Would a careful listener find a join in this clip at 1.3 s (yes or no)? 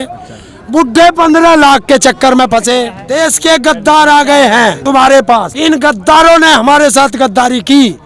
no